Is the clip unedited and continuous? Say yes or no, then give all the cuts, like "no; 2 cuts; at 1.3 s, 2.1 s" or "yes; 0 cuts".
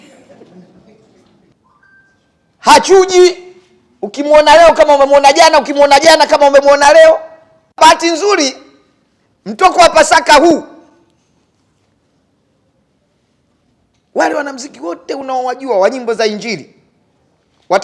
no; 2 cuts; at 1.5 s, 7.8 s